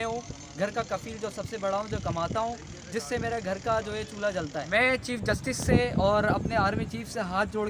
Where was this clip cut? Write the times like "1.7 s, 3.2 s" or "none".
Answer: 4.6 s